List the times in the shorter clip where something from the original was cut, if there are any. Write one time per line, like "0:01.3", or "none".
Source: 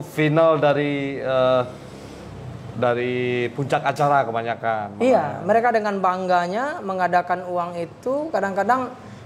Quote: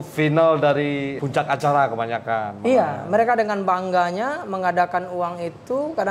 0:01.2